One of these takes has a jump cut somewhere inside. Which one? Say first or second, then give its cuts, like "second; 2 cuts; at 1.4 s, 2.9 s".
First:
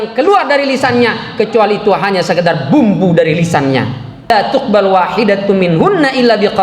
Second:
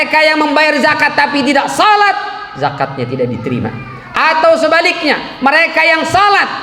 first; 1 cut; at 4.3 s